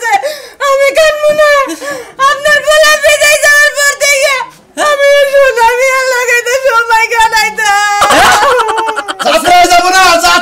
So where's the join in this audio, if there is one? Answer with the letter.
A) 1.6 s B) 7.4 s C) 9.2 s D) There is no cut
C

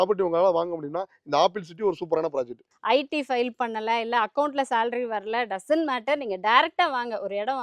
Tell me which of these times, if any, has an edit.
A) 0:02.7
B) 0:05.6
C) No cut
A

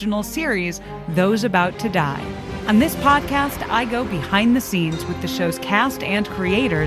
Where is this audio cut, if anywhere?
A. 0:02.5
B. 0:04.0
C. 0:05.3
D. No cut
A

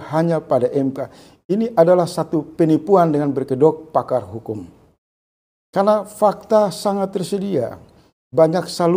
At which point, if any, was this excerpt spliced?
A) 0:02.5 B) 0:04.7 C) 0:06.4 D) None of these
D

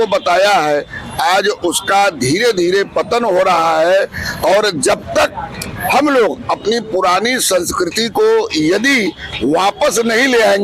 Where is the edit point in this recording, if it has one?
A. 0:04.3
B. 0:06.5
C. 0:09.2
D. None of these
D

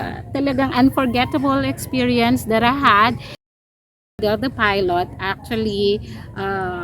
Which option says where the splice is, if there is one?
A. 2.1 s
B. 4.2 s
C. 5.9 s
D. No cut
B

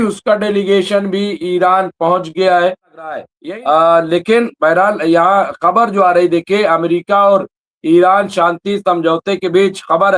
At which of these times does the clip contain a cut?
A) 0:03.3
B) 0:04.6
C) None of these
A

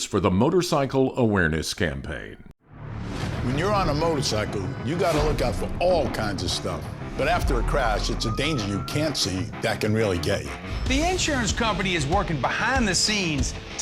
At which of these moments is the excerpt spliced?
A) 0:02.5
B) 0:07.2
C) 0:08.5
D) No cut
A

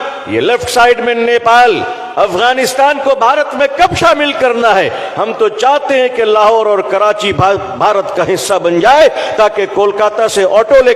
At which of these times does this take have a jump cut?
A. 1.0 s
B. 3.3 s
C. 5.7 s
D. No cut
D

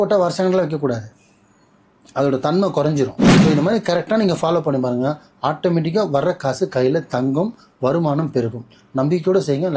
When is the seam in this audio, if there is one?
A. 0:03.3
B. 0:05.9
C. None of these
A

